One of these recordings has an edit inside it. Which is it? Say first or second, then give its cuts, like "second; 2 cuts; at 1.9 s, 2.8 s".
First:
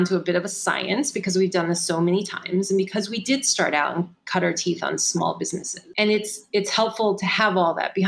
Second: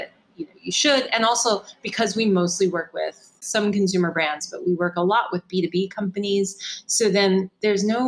first; 1 cut; at 5.9 s